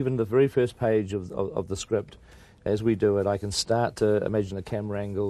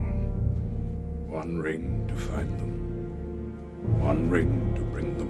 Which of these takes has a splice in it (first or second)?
first